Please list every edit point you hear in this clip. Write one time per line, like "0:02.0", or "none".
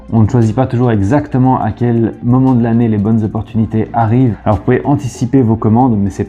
0:04.4